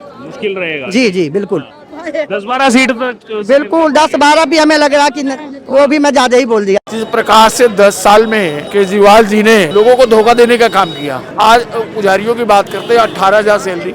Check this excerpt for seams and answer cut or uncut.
cut